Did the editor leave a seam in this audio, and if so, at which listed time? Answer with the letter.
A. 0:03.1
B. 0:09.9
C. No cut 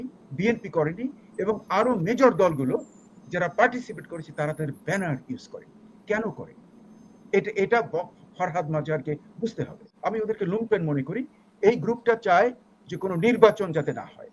B